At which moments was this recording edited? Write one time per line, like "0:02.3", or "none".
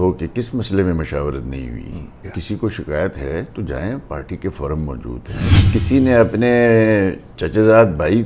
0:02.3
0:05.5